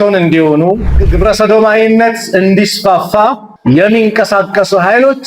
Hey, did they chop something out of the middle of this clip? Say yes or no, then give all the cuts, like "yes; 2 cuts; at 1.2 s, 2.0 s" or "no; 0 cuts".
yes; 2 cuts; at 1.1 s, 3.5 s